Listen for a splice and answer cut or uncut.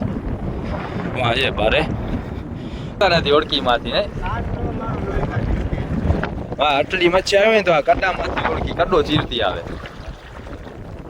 cut